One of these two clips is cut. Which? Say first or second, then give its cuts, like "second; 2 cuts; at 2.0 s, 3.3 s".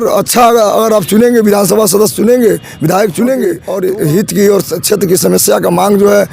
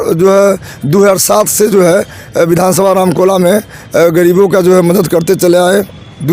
first; 1 cut; at 3.7 s